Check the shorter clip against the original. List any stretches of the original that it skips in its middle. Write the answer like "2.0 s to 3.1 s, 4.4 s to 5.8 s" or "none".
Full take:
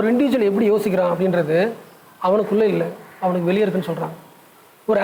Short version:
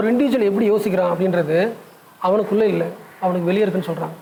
none